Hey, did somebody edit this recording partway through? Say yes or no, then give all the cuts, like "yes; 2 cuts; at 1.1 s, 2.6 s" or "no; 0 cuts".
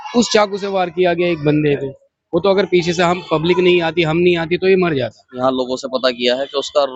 yes; 1 cut; at 5.4 s